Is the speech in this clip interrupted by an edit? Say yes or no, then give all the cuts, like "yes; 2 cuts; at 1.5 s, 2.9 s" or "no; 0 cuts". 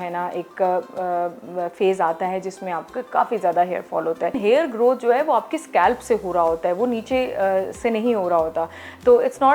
yes; 1 cut; at 4.4 s